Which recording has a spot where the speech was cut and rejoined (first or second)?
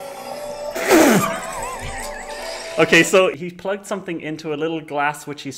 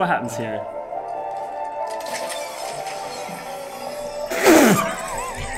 first